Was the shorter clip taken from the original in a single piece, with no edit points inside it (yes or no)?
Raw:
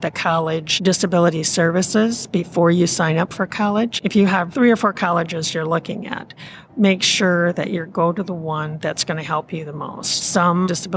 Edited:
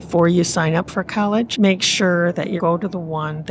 no